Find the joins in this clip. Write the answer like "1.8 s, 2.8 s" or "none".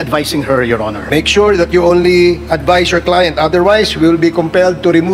1.0 s